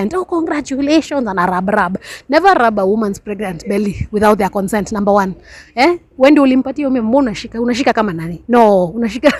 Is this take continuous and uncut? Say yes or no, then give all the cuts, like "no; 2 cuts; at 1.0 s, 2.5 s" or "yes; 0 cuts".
yes; 0 cuts